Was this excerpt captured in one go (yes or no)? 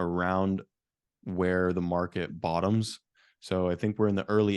yes